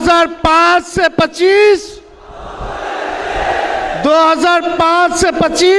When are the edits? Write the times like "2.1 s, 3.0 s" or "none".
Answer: none

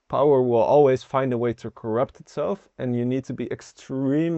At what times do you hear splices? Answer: none

